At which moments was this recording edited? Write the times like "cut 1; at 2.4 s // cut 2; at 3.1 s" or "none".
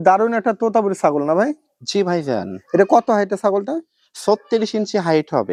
none

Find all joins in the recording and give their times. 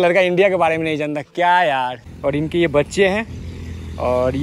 cut 1; at 2.1 s

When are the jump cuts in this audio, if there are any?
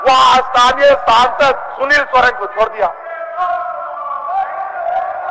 none

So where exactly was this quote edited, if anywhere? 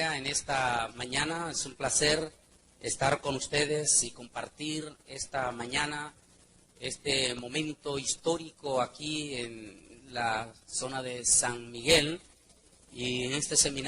none

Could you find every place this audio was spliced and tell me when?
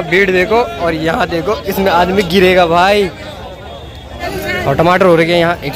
cut 1; at 4.3 s

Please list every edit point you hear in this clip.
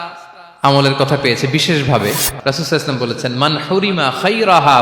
cut 1; at 2.3 s

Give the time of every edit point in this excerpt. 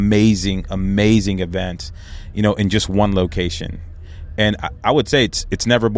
none

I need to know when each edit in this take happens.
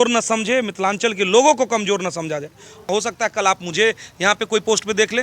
cut 1; at 2.8 s

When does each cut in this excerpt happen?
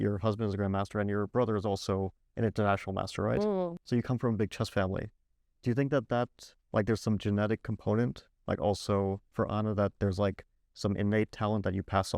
none

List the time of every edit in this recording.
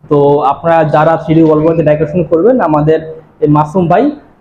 none

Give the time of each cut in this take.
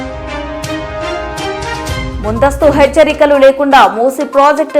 cut 1; at 2.1 s

